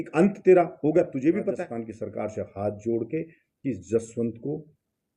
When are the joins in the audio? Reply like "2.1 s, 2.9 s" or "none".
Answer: 1.6 s

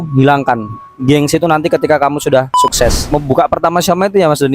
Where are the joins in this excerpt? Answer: 3.0 s

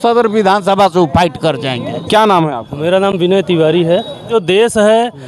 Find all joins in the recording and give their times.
1.9 s, 4.3 s

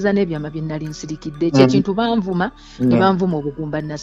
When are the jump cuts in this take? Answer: none

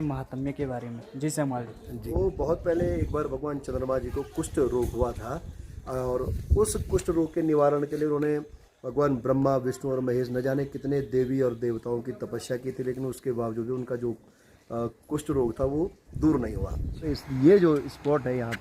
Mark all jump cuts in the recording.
1.9 s, 17.2 s

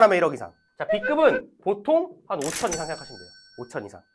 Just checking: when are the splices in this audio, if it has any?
none

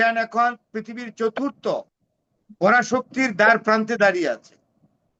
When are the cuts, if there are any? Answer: none

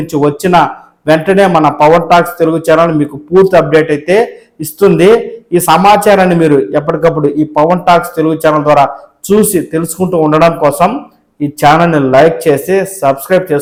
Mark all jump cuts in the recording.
none

